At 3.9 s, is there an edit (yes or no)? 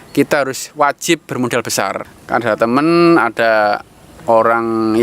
no